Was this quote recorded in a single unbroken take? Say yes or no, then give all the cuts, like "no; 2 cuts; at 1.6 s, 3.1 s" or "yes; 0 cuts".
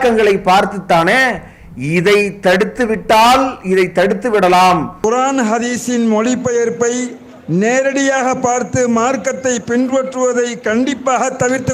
yes; 0 cuts